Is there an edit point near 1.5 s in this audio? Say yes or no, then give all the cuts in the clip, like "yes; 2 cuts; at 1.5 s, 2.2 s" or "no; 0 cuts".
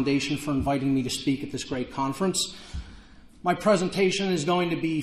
yes; 1 cut; at 1.5 s